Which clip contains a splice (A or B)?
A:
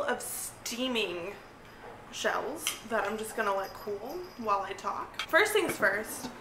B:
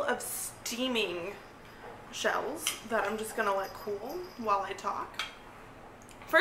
A